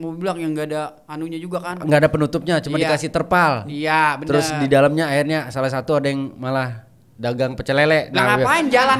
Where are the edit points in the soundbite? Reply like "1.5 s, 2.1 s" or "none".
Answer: none